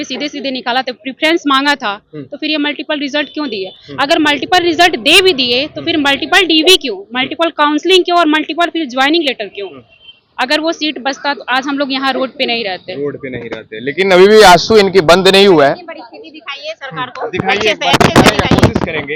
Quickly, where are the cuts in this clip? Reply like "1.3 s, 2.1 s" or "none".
none